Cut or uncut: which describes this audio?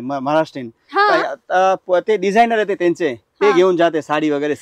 uncut